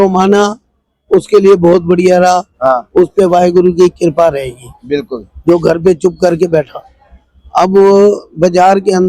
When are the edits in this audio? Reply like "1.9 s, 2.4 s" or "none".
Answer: none